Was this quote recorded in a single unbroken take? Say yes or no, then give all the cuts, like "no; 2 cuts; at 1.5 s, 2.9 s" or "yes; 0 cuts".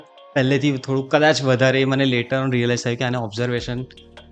yes; 0 cuts